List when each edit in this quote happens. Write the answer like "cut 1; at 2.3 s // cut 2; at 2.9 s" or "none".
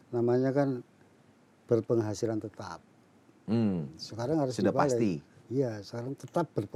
none